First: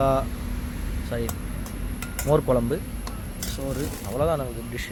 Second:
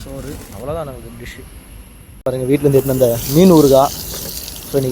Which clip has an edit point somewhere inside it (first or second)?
second